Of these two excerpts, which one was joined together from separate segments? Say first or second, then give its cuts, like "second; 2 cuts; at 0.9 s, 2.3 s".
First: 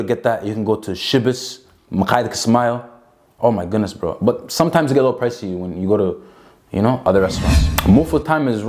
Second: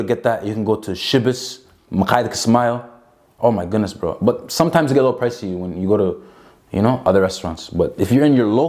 first; 1 cut; at 7.7 s